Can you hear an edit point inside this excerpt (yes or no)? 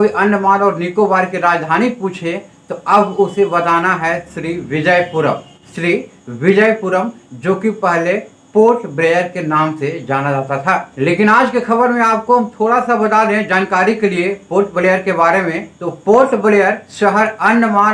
no